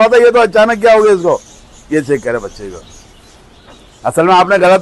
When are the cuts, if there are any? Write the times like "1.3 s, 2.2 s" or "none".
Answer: none